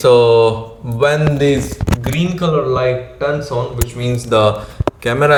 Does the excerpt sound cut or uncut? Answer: uncut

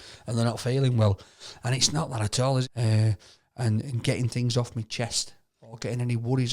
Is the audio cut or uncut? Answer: cut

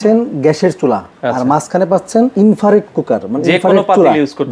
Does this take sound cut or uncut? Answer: cut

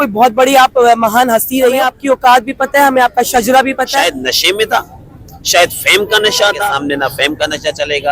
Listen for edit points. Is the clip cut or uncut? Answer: cut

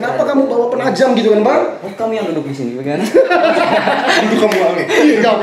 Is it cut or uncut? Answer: uncut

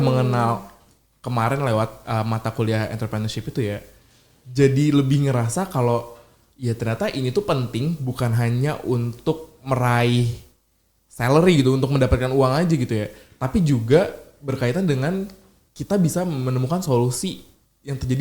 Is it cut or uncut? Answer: uncut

